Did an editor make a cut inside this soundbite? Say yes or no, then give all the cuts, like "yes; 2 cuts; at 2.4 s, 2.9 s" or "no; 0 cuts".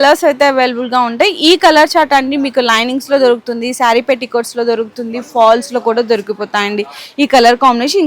no; 0 cuts